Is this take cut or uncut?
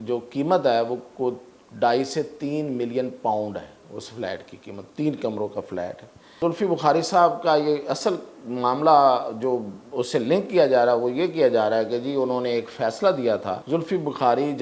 cut